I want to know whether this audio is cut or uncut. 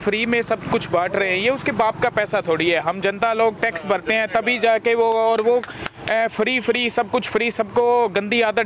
uncut